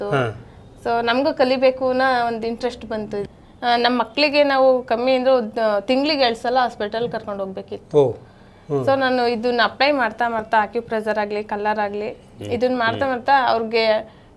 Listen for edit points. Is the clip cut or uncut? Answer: cut